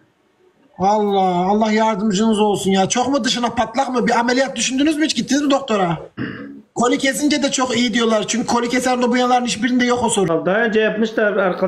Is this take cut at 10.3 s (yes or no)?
yes